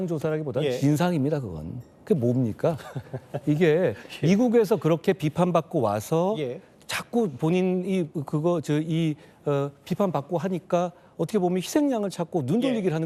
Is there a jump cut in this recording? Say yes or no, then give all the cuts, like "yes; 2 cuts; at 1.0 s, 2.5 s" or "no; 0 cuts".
no; 0 cuts